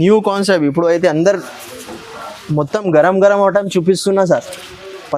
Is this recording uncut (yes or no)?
yes